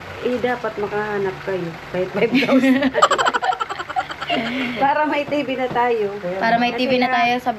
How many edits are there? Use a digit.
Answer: 0